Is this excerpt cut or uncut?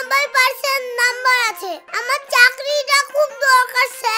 uncut